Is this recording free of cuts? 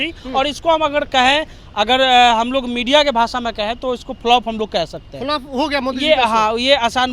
yes; 0 cuts

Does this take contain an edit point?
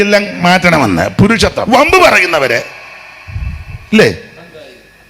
yes; 1 cut; at 1.6 s

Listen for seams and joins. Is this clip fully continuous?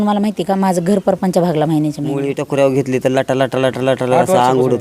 no; 1 cut; at 2.3 s

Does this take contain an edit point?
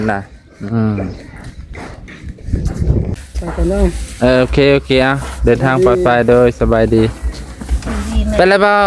yes; 1 cut; at 3.1 s

